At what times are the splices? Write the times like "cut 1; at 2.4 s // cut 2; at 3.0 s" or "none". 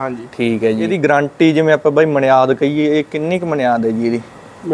cut 1; at 1.3 s